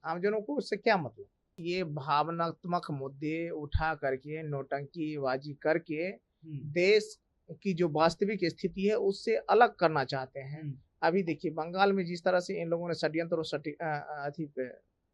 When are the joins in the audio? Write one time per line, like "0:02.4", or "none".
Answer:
0:01.5